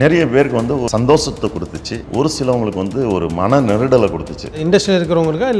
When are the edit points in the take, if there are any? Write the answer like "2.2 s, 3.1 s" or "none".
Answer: 0.9 s, 2.0 s, 4.6 s